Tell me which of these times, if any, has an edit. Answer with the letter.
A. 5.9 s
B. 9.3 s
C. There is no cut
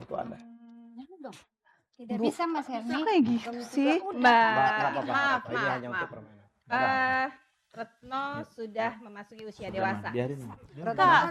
C